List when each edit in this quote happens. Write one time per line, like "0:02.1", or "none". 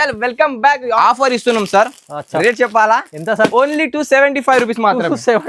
0:00.9